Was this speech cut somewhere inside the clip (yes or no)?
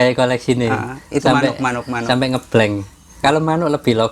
yes